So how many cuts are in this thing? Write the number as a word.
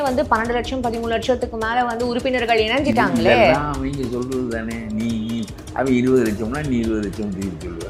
zero